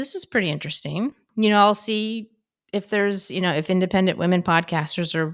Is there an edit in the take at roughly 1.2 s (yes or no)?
yes